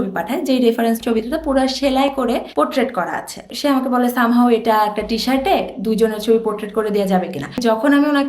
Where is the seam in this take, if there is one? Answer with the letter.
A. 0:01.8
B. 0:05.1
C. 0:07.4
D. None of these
C